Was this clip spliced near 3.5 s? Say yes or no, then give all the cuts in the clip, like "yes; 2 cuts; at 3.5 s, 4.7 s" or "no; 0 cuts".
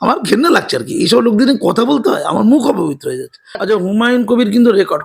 yes; 1 cut; at 3.5 s